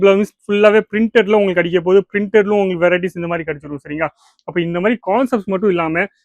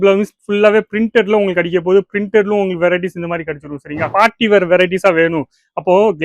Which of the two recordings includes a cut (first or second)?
second